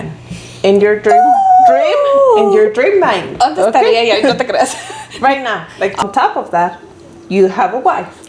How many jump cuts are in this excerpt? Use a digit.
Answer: 1